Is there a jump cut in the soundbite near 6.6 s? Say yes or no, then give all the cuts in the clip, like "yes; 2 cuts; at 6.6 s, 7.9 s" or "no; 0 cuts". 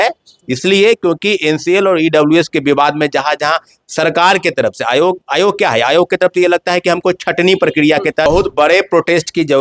no; 1 cut; at 8.3 s